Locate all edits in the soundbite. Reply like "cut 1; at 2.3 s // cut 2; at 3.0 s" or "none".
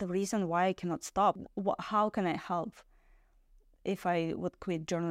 cut 1; at 1.4 s